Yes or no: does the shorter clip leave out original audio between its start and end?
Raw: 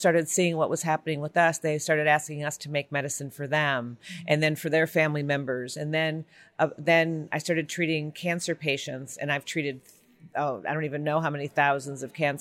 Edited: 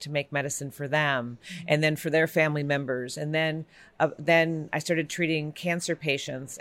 no